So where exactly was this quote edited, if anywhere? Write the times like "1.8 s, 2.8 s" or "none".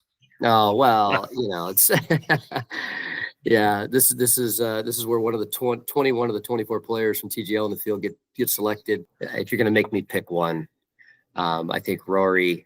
9.2 s